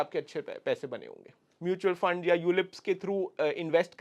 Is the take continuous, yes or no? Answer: no